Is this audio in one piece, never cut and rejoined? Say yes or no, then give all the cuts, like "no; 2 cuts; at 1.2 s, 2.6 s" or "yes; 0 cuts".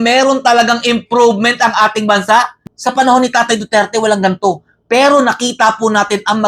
no; 1 cut; at 2.6 s